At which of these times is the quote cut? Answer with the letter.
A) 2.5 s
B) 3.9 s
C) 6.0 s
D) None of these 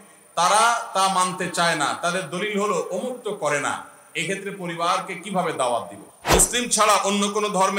C